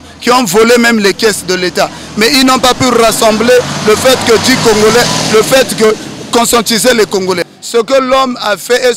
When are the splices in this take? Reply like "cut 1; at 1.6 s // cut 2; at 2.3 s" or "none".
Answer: cut 1; at 7.4 s